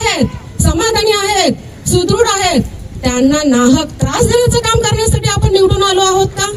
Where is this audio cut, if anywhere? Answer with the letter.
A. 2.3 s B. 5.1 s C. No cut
C